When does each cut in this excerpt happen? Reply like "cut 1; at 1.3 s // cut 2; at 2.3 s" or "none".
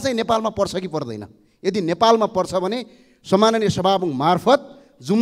none

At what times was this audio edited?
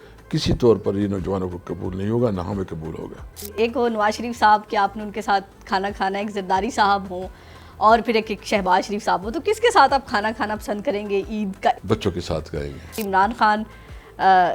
cut 1; at 3.5 s // cut 2; at 11.8 s // cut 3; at 12.9 s

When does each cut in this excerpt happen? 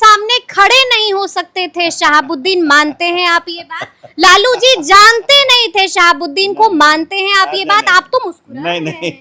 none

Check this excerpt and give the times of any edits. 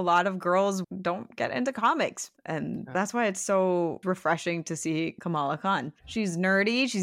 cut 1; at 0.8 s // cut 2; at 2.4 s // cut 3; at 4.0 s // cut 4; at 5.5 s

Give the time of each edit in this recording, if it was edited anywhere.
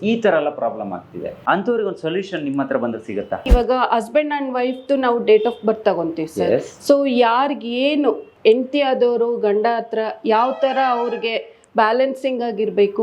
cut 1; at 1.3 s // cut 2; at 3.5 s // cut 3; at 8.3 s

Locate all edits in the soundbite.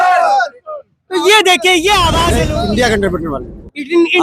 cut 1; at 2.3 s

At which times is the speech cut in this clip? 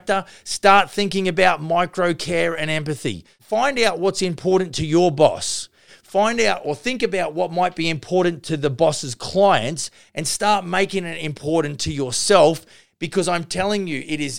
cut 1; at 3.3 s

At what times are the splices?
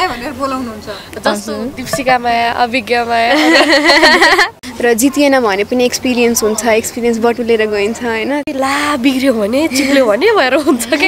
cut 1; at 4.6 s // cut 2; at 8.5 s

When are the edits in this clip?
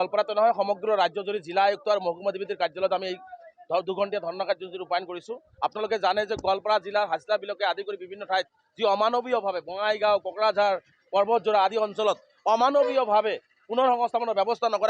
none

